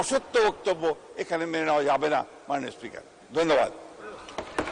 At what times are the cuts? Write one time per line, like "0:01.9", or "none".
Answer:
none